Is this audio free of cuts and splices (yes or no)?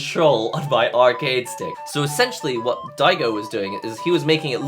no